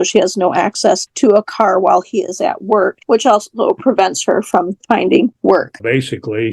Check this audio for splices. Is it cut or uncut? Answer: cut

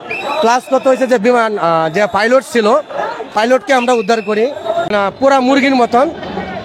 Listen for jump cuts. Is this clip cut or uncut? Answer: cut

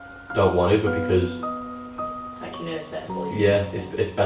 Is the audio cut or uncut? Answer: uncut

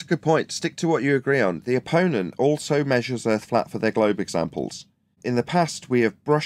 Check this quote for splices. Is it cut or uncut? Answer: cut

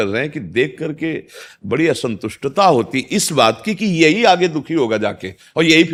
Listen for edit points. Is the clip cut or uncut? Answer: uncut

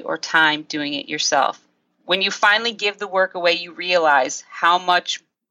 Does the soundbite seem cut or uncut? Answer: uncut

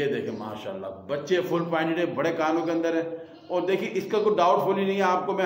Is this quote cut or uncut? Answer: uncut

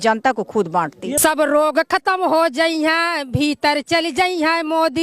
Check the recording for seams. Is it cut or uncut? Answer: cut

